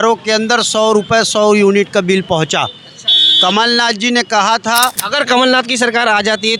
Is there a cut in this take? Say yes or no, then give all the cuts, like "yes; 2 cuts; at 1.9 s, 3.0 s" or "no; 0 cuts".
yes; 1 cut; at 5.0 s